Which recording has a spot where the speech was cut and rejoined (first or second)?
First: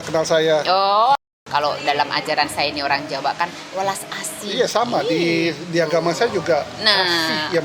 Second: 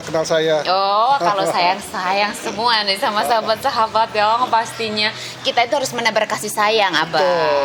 first